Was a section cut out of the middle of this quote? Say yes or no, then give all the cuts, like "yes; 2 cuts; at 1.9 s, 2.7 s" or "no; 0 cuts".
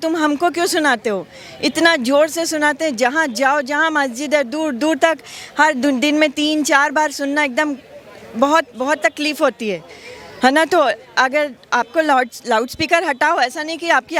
no; 0 cuts